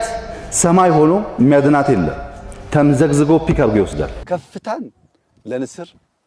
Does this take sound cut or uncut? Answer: cut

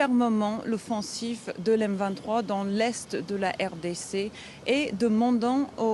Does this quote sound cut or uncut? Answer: uncut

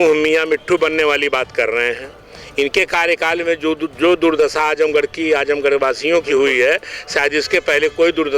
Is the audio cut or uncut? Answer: uncut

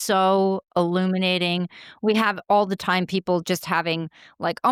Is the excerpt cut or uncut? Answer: uncut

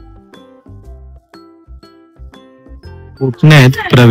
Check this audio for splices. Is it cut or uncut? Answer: cut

